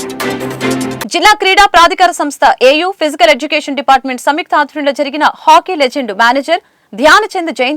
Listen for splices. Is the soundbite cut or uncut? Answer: cut